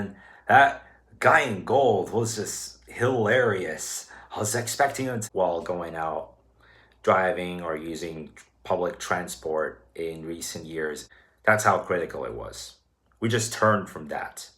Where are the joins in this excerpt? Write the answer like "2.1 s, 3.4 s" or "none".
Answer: 5.2 s, 11.0 s